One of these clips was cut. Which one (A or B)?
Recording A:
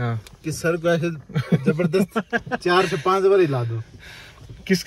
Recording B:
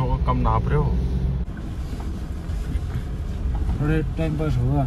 B